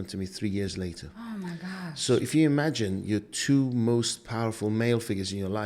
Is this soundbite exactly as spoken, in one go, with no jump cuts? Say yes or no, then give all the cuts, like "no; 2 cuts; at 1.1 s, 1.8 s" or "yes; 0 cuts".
yes; 0 cuts